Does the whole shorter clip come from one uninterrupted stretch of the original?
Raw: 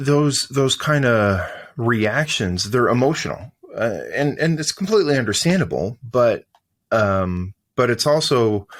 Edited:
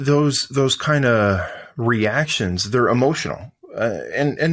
yes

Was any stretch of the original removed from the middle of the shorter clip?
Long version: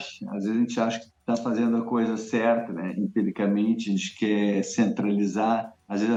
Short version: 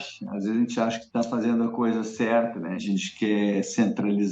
yes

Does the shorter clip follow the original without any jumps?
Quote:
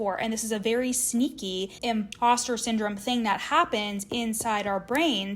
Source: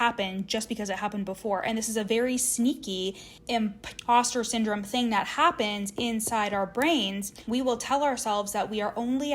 no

